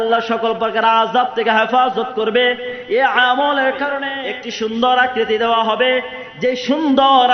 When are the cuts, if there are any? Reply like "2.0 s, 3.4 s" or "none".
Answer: 4.1 s